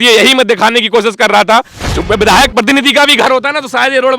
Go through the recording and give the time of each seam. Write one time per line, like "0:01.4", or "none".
0:01.8